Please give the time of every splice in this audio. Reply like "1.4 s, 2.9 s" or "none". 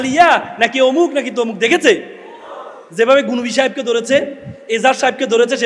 none